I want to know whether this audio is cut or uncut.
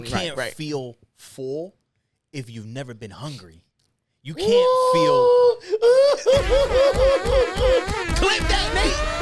uncut